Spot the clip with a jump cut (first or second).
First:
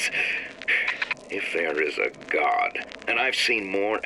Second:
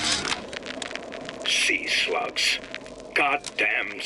second